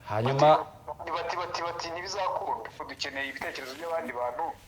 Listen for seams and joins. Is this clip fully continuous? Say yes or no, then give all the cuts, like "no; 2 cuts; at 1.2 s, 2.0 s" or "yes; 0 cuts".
no; 1 cut; at 2.9 s